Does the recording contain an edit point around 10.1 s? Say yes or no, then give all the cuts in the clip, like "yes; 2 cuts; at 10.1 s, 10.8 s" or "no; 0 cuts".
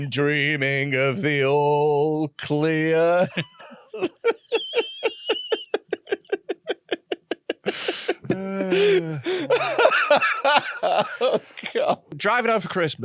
no; 1 cut; at 12.1 s